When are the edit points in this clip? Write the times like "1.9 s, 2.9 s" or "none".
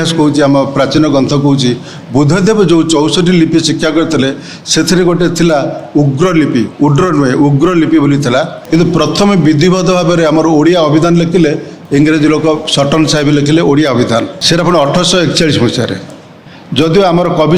8.6 s, 11.8 s, 14.4 s